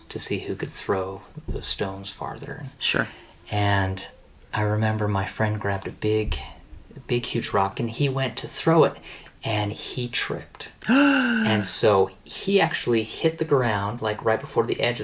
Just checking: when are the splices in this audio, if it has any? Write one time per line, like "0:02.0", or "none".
0:07.7